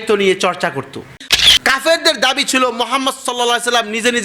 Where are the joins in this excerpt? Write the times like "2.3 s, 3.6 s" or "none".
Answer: 1.2 s